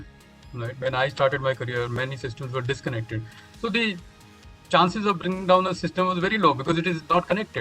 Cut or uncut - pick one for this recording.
uncut